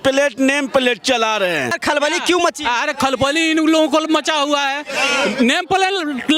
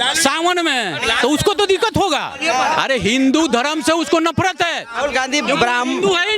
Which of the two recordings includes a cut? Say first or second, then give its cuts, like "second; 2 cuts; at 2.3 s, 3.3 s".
first; 1 cut; at 1.8 s